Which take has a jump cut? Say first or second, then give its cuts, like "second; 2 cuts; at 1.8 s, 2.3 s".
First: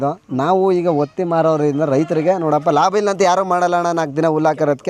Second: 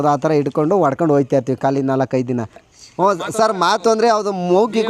second; 1 cut; at 2.6 s